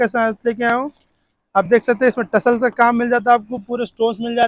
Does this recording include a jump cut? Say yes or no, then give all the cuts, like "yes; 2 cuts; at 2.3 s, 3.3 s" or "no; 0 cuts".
no; 0 cuts